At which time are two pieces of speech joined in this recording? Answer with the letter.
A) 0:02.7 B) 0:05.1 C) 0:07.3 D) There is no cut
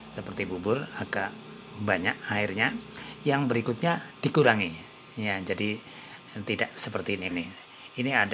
C